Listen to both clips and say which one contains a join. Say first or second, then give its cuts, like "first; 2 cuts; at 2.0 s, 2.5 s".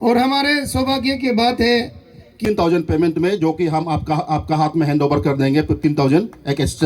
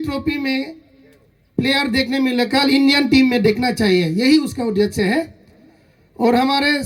first; 1 cut; at 2.4 s